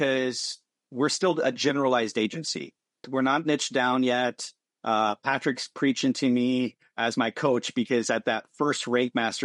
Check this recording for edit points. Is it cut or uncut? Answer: cut